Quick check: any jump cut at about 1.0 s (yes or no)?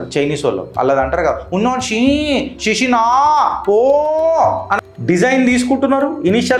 no